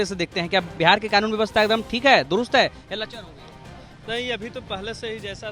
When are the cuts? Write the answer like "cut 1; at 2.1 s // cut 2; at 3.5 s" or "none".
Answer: none